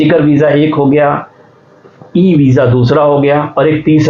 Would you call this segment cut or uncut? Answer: uncut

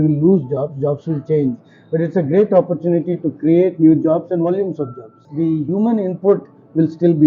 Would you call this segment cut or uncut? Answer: cut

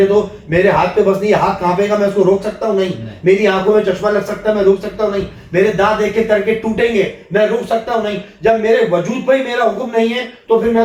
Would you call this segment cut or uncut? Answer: uncut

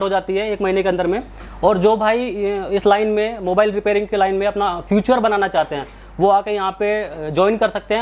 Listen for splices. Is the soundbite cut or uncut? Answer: uncut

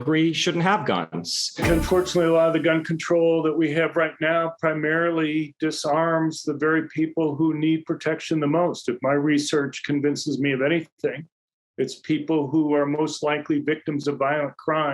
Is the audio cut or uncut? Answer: cut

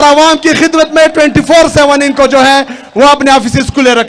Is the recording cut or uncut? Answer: uncut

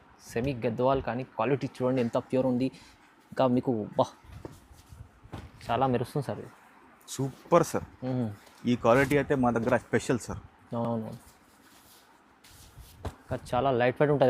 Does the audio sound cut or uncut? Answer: uncut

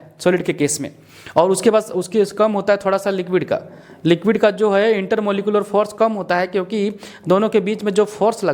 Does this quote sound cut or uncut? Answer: uncut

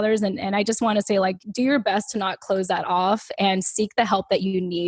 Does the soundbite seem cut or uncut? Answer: cut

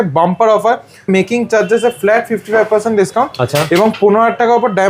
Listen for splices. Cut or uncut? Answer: cut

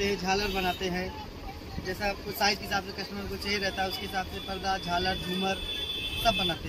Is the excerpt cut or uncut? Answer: uncut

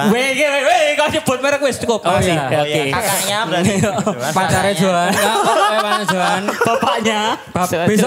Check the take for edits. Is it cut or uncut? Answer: uncut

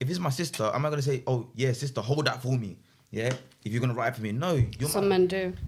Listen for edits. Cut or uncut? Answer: uncut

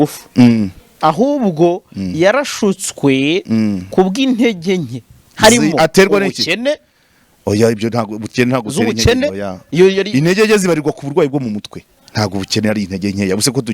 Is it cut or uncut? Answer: uncut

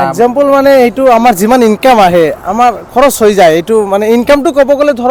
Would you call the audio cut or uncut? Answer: uncut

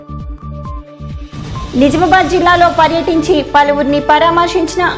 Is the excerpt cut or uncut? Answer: uncut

